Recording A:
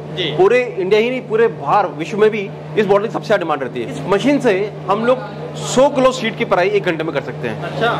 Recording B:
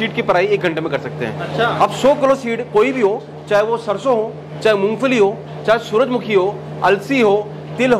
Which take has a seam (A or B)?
A